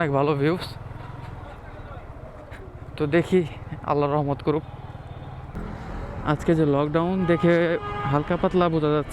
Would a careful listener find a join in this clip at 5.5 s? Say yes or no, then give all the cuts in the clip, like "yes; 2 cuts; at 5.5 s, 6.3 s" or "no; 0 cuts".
yes; 1 cut; at 5.5 s